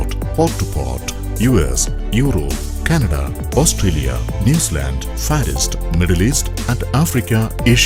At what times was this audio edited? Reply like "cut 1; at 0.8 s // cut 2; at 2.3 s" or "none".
none